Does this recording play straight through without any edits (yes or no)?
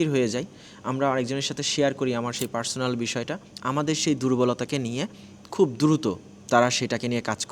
no